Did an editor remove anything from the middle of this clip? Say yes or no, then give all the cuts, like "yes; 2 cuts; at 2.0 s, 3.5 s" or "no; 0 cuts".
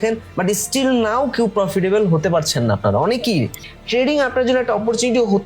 yes; 1 cut; at 3.7 s